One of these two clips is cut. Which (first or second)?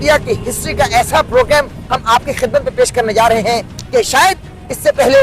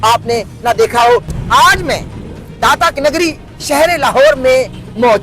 second